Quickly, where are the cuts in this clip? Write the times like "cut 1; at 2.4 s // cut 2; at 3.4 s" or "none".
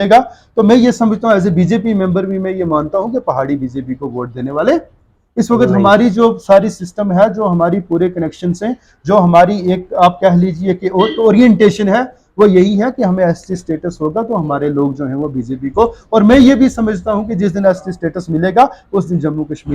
none